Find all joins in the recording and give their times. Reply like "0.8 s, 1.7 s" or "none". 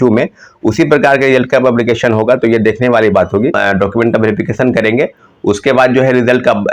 3.6 s